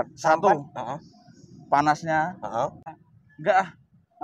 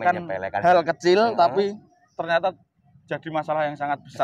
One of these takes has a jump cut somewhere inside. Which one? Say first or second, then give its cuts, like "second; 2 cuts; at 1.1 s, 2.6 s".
first; 1 cut; at 2.9 s